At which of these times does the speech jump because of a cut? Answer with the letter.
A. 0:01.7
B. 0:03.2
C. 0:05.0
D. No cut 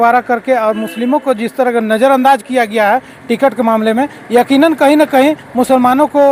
D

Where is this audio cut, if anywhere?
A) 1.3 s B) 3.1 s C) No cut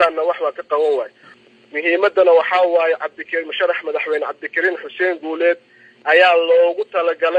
A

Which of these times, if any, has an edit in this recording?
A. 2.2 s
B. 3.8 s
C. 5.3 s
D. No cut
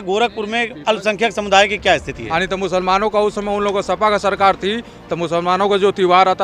A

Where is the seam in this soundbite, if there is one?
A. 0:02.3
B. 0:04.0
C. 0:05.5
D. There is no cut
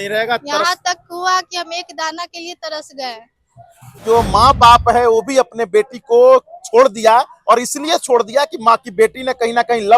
B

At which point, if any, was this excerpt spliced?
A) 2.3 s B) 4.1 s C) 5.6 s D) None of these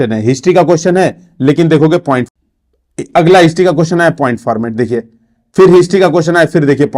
A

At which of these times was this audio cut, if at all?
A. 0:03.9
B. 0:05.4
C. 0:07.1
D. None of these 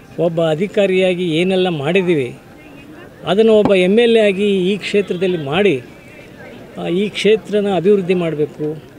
D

